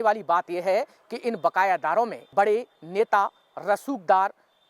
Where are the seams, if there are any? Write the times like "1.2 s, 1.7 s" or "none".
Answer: 2.2 s